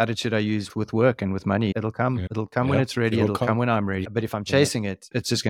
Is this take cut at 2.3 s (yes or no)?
yes